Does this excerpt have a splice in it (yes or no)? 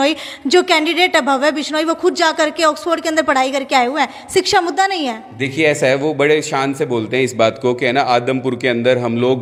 no